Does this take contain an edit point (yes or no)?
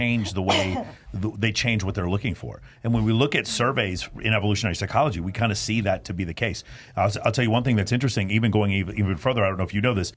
no